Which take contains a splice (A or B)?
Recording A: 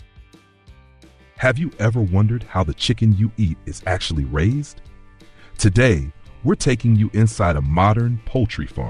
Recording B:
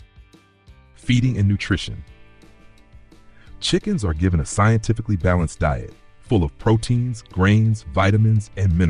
A